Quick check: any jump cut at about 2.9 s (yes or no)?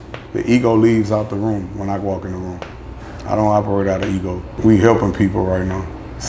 no